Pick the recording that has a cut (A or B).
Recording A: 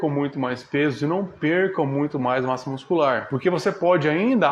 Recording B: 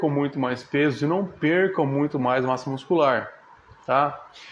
A